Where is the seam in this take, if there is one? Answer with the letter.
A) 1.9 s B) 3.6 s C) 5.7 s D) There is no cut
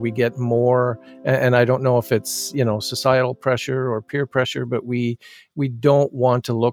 D